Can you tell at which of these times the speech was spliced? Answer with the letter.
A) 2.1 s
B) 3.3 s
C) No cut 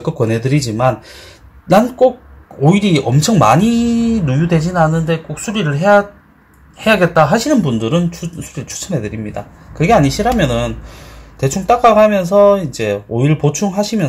C